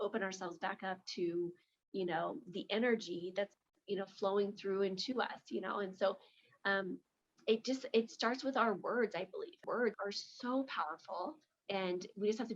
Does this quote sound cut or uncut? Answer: cut